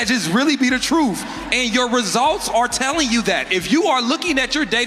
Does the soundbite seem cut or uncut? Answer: uncut